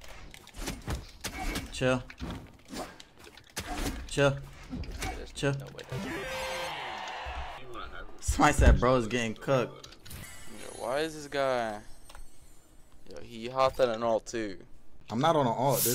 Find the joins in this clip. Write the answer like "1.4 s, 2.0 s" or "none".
none

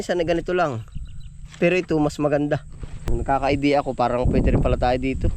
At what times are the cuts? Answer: 3.1 s

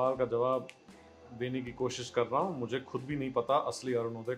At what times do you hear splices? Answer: none

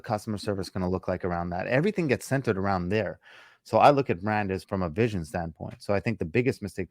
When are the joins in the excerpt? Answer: 4.6 s

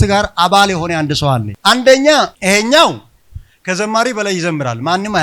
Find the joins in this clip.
2.3 s

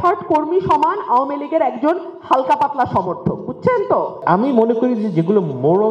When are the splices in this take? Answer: 4.2 s

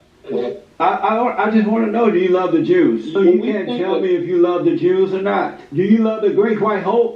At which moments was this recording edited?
3.2 s, 5.6 s

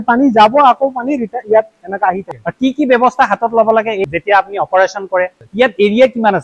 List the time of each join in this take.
2.2 s, 4.0 s, 5.4 s

